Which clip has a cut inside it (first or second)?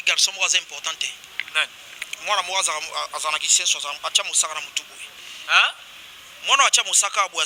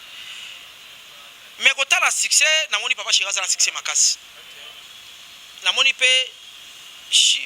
second